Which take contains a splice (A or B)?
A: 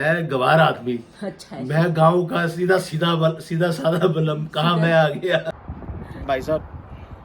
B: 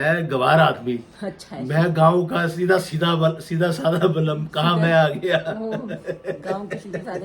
A